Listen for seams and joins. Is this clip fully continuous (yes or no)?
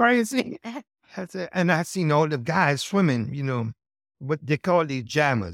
yes